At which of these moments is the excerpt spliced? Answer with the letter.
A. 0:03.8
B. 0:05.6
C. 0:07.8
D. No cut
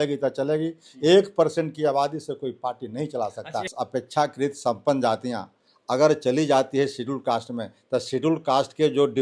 A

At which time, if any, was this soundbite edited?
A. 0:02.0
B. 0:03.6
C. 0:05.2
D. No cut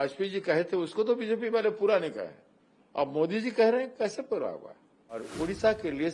C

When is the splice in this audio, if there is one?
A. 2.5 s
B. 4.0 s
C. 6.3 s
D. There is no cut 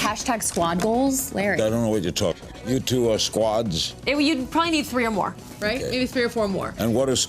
A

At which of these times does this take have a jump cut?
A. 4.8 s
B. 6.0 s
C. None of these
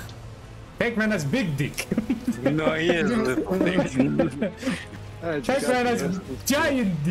A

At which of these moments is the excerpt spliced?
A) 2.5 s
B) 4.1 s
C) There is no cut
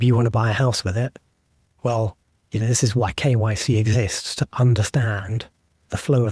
C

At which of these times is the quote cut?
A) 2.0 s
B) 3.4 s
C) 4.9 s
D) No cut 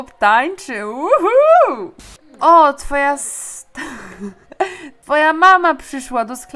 C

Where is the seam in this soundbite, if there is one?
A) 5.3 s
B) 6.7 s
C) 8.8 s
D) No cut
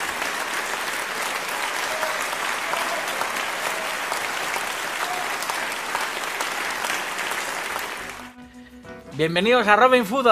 B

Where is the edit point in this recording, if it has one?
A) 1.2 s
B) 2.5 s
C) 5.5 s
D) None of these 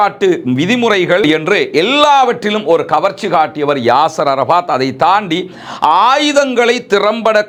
D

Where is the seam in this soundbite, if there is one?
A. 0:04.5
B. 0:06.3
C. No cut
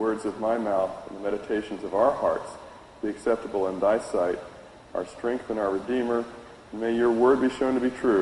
C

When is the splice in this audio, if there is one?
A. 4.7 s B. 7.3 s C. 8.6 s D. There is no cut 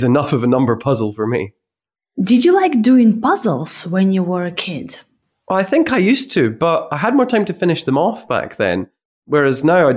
D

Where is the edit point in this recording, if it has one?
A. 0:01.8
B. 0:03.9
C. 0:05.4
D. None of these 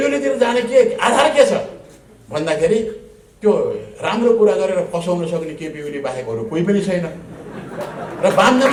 D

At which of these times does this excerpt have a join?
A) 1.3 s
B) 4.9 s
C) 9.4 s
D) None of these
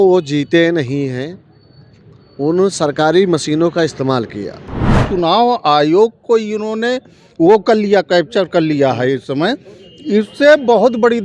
B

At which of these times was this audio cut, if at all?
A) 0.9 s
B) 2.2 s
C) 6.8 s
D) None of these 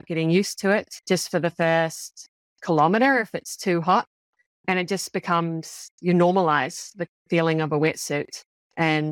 A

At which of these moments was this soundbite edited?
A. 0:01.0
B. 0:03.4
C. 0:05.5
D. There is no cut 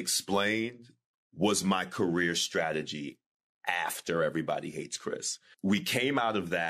C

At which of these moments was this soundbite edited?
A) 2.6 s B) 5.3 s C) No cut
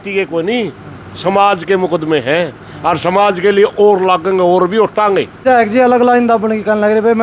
B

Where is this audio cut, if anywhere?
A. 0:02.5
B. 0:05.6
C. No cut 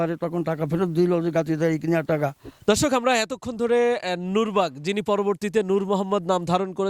A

